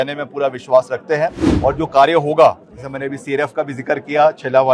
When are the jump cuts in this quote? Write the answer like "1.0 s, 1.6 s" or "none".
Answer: 1.5 s